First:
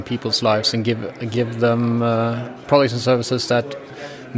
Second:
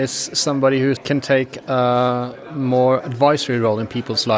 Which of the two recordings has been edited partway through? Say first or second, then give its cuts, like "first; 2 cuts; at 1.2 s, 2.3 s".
second; 1 cut; at 1.0 s